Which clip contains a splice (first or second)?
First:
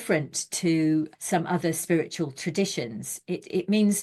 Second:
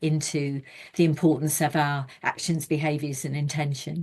first